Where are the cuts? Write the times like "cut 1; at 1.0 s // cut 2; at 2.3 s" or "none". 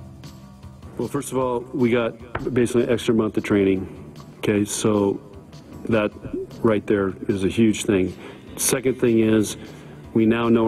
cut 1; at 1.0 s